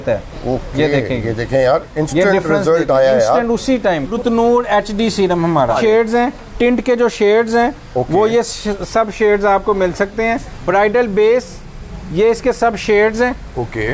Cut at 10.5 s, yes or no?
yes